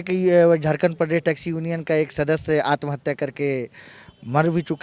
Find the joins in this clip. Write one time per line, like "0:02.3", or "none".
none